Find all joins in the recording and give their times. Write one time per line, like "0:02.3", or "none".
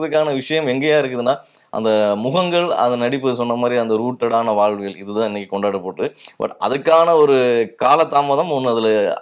none

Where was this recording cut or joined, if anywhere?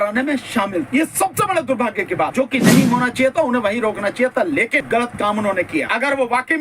0:00.9
0:02.3
0:04.9
0:05.9

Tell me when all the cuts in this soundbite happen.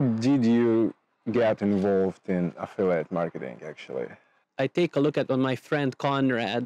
0:04.4

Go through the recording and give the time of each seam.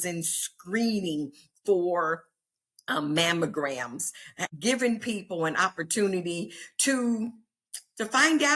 0:04.4

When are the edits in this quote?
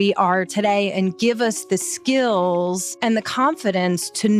0:02.9

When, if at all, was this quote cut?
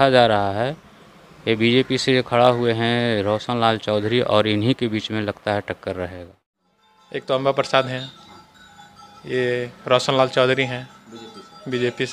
0:06.4

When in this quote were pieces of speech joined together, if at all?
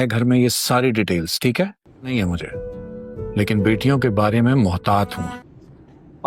0:02.1
0:05.2

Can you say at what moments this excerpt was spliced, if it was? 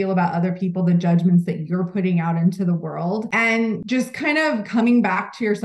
0:03.7

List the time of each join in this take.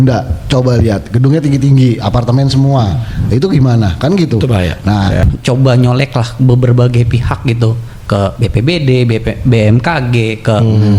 0:05.2

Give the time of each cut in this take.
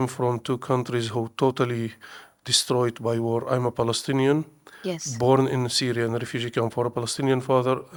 none

